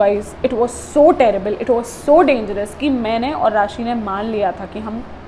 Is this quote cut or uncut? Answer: uncut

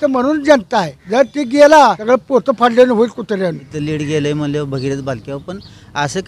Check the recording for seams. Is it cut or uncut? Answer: cut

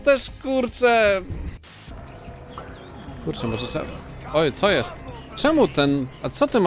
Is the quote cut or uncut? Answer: cut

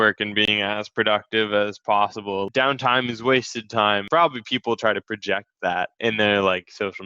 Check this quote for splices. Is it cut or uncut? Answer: cut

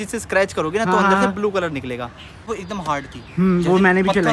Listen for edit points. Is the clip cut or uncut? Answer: cut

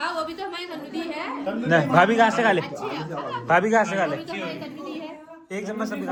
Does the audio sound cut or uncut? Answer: uncut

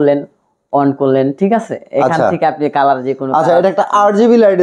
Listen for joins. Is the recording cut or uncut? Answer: uncut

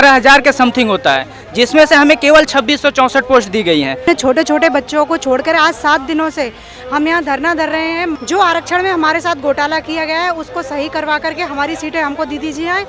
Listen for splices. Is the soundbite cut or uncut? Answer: cut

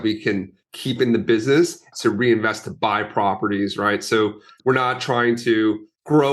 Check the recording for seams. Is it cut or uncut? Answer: cut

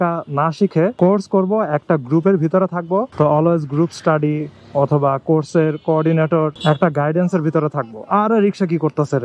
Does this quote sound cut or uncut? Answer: cut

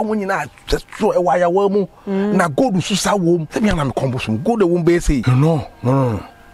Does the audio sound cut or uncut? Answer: cut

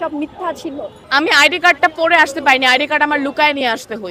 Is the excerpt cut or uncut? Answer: cut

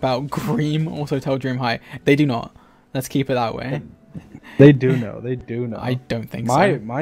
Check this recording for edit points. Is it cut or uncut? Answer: uncut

